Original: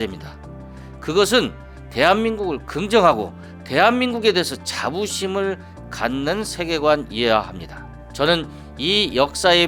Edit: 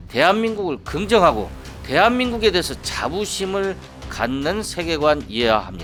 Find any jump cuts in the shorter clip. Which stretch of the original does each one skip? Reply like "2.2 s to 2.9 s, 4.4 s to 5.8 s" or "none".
none